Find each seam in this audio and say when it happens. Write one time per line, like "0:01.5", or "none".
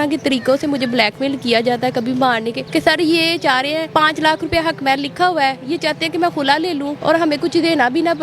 0:02.6
0:03.9
0:06.9